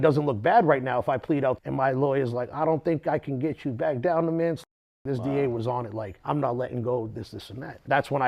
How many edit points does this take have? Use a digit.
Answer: 2